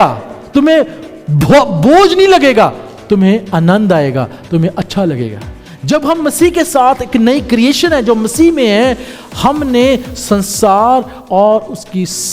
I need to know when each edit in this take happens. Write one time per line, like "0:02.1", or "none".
0:05.5